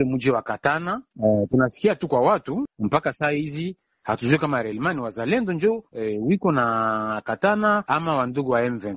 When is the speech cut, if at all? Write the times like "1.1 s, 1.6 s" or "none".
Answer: 7.8 s